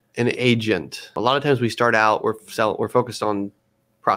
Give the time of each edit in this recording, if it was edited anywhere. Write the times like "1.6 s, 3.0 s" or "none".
1.2 s